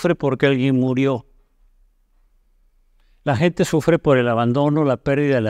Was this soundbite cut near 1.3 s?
no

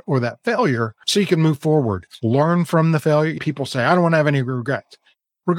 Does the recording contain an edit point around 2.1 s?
yes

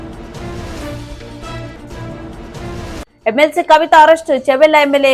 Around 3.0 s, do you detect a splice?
yes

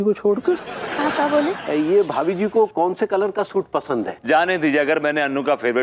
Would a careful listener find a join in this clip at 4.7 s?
no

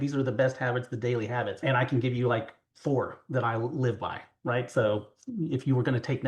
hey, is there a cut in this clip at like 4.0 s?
no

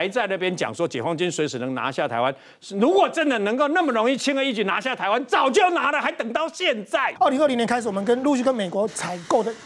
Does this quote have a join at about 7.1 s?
yes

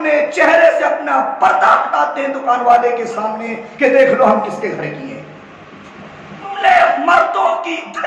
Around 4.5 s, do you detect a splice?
no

